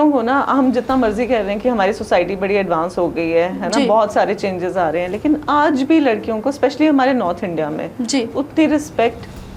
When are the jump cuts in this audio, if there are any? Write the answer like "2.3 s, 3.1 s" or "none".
none

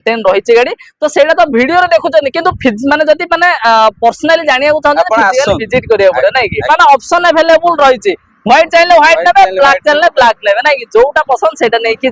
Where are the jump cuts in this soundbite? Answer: 6.7 s

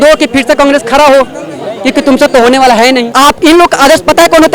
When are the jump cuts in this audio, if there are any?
3.1 s

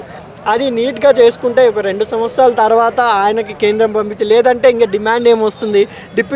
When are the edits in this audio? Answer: none

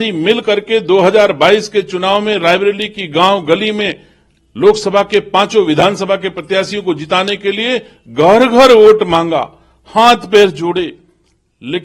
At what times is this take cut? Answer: none

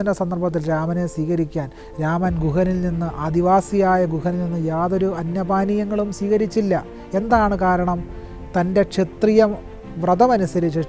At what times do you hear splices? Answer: none

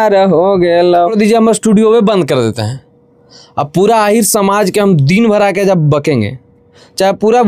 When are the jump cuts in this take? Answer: 1.1 s

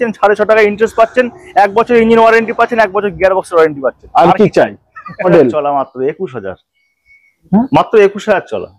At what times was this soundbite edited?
5.3 s

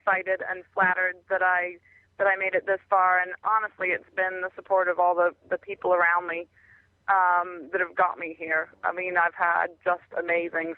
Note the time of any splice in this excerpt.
none

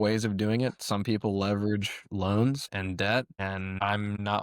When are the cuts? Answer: 2.7 s

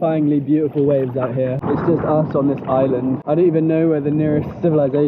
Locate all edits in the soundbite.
1.6 s, 3.2 s

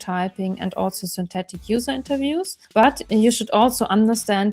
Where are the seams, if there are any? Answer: 2.6 s

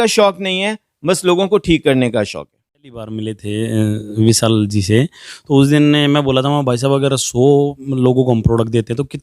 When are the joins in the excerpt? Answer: 3.1 s

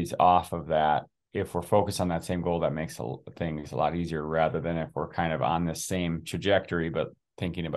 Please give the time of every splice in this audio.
1.2 s

